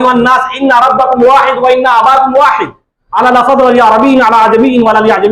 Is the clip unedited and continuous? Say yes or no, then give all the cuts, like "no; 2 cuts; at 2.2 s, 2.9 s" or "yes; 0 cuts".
yes; 0 cuts